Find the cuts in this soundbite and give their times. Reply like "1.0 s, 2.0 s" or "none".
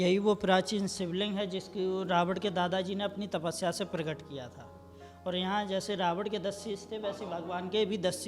none